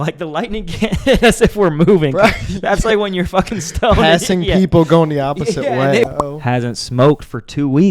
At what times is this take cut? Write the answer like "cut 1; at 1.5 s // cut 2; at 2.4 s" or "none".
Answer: cut 1; at 6.1 s